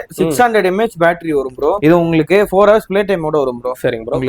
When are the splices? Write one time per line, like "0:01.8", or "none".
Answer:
0:01.8